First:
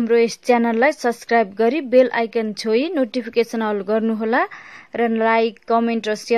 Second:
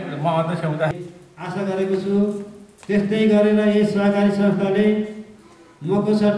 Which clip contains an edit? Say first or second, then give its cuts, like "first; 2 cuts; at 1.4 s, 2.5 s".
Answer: second; 1 cut; at 0.9 s